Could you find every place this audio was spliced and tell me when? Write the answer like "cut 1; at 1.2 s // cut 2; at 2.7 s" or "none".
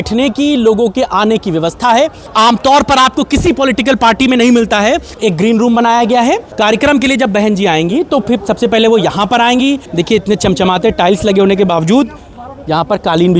cut 1; at 2.3 s // cut 2; at 5.1 s // cut 3; at 6.5 s // cut 4; at 9.8 s